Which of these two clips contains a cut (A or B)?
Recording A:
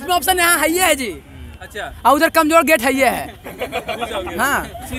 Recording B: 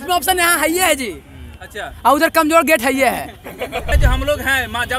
B